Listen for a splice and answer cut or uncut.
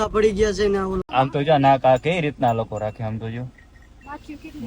cut